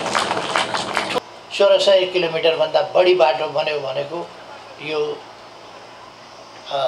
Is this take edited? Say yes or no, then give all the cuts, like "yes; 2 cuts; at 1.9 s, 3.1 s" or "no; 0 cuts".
yes; 1 cut; at 1.1 s